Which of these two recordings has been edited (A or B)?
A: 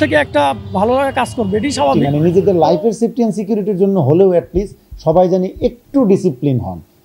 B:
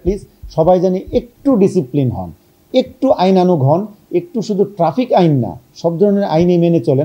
A